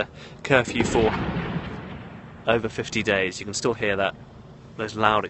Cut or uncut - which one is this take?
cut